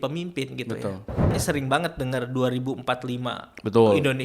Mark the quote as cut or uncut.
cut